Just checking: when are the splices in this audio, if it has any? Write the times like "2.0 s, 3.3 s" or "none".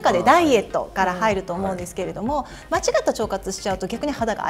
none